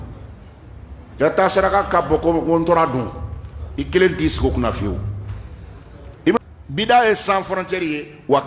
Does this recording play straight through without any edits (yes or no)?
no